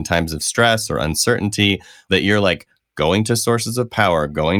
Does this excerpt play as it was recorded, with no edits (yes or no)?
no